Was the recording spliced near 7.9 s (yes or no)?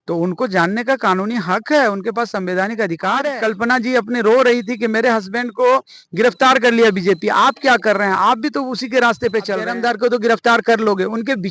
no